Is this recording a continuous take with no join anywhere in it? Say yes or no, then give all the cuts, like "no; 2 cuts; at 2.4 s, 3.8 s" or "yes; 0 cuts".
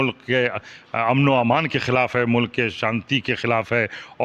yes; 0 cuts